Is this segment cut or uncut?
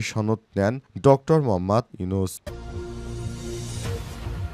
cut